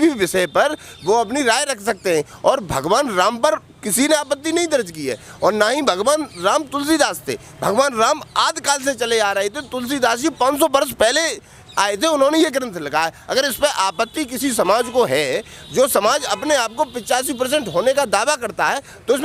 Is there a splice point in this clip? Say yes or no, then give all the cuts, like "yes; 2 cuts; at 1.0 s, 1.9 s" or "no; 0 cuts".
no; 0 cuts